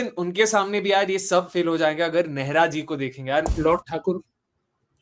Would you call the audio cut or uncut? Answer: cut